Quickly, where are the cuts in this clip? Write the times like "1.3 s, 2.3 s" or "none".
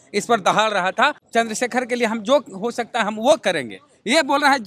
1.2 s